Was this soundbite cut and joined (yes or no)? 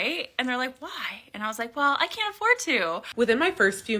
yes